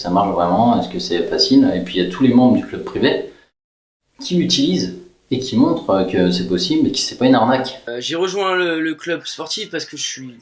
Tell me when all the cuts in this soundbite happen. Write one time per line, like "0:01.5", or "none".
0:07.8